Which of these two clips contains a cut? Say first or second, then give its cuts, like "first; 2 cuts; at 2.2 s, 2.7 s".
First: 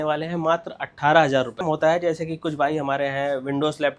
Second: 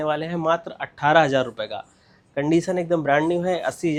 first; 1 cut; at 1.6 s